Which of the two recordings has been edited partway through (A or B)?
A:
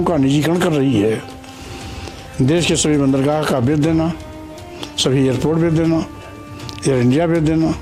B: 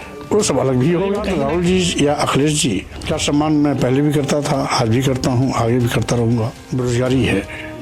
B